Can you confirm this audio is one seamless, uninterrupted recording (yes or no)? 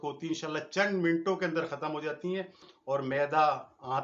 no